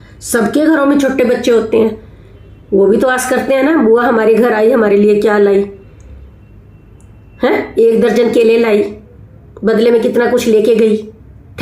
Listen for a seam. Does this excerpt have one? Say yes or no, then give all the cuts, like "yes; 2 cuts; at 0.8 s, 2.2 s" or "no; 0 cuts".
no; 0 cuts